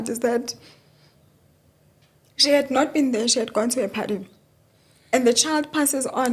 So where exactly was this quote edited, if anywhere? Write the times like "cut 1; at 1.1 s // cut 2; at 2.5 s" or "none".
none